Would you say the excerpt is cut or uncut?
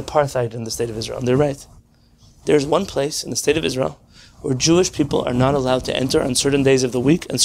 uncut